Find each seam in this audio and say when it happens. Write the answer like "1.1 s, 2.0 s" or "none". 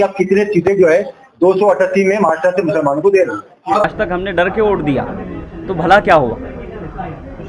3.9 s